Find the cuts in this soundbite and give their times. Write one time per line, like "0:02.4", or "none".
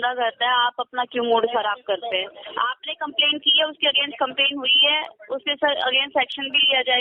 none